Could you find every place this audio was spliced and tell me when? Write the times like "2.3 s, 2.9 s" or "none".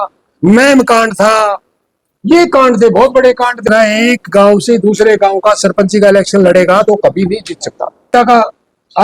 3.6 s, 8.1 s